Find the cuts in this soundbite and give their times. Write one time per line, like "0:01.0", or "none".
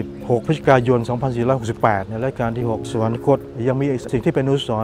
0:03.5